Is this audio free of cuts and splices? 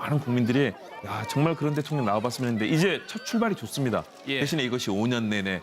yes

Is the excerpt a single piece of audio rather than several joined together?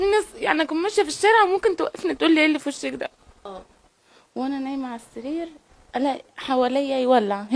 no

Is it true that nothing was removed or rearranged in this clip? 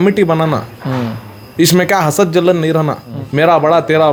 yes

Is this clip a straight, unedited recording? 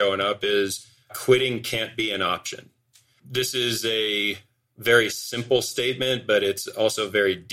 no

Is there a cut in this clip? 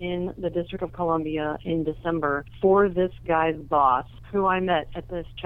yes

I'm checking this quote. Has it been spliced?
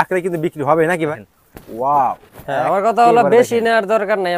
yes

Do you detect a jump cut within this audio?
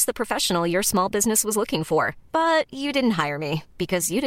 no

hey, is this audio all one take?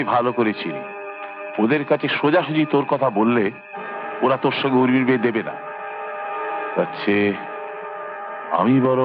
yes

